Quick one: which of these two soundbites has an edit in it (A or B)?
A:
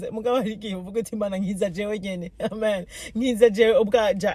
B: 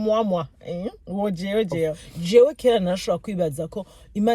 B